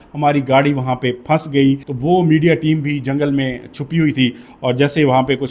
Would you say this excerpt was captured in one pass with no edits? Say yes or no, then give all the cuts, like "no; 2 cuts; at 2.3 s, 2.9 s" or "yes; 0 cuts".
no; 1 cut; at 1.9 s